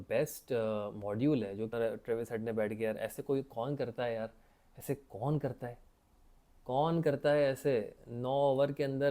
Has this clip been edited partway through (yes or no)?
yes